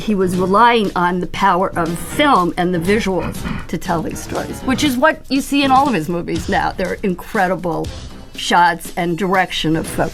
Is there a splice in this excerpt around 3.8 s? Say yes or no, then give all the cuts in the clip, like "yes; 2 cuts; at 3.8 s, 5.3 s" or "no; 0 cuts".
no; 0 cuts